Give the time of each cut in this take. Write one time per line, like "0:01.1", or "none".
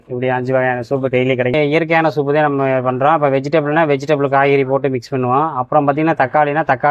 none